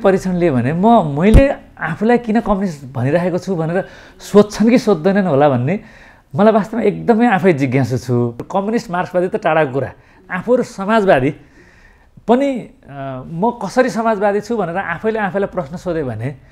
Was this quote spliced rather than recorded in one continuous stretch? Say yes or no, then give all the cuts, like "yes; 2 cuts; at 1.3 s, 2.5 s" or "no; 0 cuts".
yes; 1 cut; at 8.4 s